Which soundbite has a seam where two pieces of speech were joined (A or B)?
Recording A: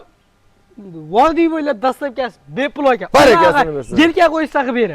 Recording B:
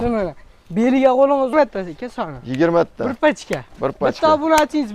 B